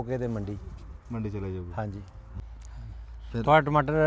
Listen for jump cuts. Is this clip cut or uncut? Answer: cut